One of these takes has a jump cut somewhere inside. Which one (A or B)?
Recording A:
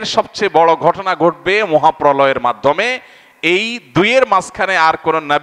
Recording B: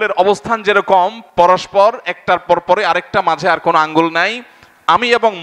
B